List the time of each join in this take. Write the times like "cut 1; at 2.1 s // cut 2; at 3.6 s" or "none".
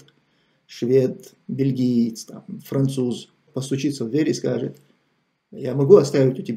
cut 1; at 3.5 s